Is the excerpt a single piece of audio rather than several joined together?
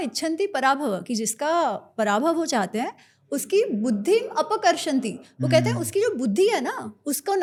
yes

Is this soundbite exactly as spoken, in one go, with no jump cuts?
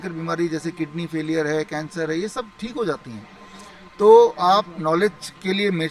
yes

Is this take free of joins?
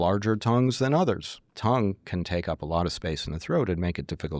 no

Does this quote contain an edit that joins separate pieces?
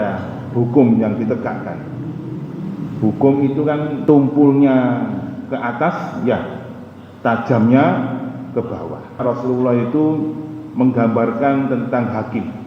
yes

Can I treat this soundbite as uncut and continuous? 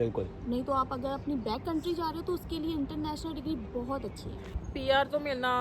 no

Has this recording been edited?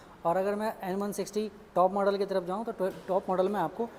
no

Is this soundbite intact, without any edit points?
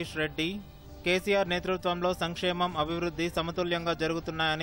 yes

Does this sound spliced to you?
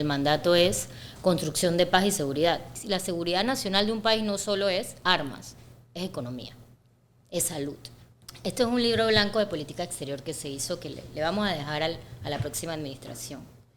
yes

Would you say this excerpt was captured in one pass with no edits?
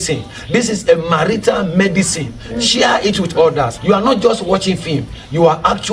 no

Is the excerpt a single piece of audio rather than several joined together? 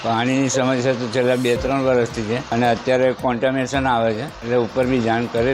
no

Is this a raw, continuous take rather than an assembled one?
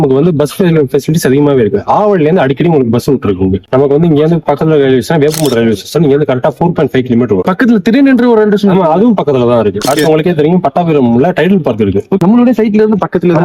no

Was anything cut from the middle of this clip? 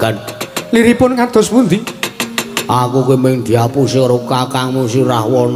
no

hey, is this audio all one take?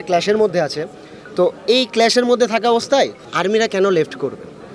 yes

